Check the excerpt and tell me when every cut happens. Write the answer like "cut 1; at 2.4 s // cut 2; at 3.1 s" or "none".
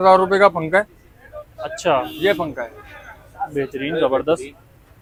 none